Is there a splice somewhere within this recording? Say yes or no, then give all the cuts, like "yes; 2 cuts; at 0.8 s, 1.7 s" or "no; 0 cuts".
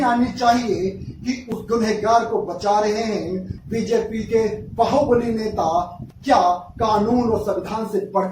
yes; 1 cut; at 3.5 s